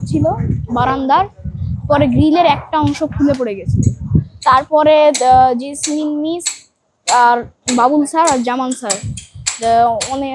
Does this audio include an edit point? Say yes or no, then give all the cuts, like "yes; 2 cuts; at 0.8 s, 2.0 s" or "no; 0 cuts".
no; 0 cuts